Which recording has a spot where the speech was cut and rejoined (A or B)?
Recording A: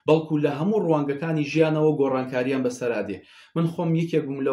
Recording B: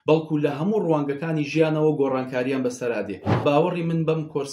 B